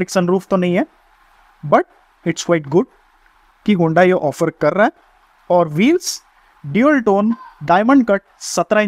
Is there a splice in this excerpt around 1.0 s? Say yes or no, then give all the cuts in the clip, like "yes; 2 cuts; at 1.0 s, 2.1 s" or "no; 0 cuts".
no; 0 cuts